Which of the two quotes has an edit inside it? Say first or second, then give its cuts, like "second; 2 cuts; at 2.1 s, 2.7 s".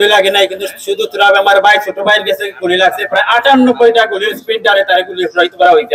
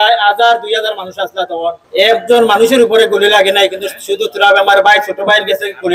second; 1 cut; at 1.8 s